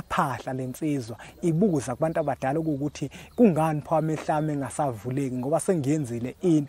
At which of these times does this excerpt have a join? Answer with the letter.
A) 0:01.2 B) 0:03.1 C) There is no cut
C